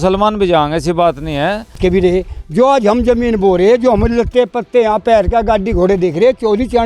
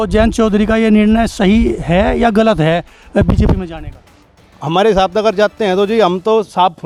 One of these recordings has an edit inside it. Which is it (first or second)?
first